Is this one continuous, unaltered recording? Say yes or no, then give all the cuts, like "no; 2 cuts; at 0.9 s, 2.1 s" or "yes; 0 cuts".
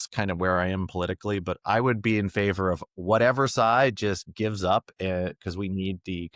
yes; 0 cuts